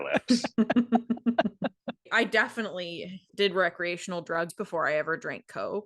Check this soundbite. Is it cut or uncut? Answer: cut